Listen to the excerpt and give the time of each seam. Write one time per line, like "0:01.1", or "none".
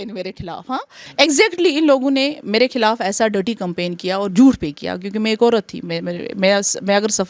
0:01.0